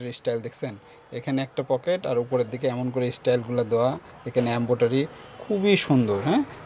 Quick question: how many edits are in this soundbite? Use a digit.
0